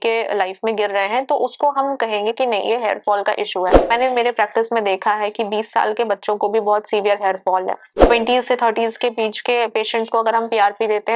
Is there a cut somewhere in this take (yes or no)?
yes